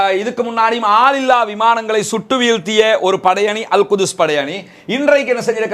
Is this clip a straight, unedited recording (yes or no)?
yes